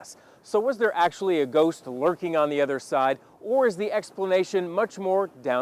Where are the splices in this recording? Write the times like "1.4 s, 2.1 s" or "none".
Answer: none